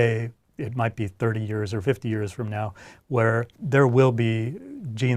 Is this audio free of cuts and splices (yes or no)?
no